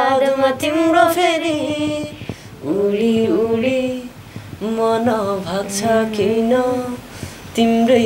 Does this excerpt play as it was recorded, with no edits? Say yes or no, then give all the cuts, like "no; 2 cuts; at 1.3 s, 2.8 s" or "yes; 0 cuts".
yes; 0 cuts